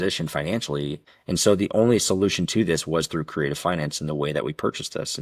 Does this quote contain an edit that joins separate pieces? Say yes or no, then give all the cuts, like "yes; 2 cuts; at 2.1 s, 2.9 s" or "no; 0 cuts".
yes; 1 cut; at 1.1 s